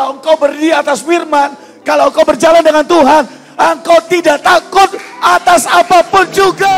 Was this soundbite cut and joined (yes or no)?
no